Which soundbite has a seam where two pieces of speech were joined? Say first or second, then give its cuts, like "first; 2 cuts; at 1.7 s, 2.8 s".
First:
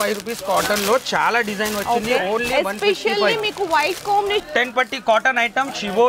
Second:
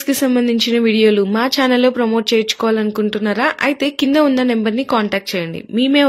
first; 1 cut; at 4.4 s